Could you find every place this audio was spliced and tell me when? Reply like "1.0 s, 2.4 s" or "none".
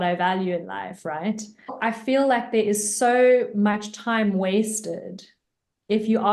1.7 s